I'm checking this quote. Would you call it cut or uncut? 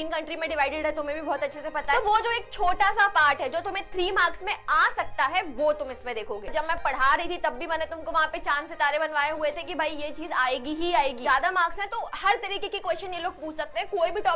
cut